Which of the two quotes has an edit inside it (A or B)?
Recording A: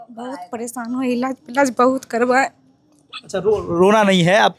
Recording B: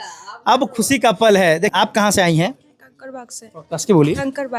B